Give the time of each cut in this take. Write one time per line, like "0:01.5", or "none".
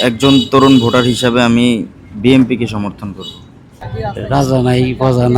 0:03.8